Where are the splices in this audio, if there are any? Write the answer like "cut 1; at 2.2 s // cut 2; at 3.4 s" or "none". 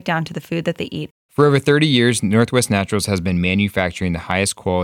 cut 1; at 1.2 s